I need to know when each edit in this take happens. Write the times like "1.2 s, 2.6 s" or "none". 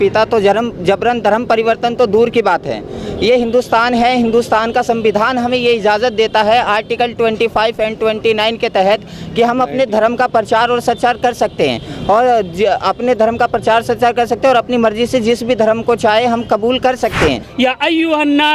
17.5 s